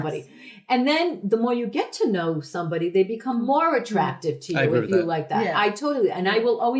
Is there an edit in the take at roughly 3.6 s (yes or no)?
no